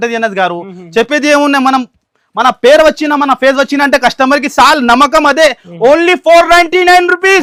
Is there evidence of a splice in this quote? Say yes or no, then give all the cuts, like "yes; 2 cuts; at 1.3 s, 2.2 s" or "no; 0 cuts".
no; 0 cuts